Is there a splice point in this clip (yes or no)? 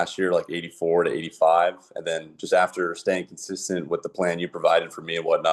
no